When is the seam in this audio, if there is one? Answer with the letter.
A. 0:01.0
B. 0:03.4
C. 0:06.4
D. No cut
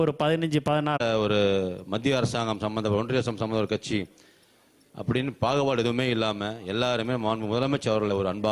A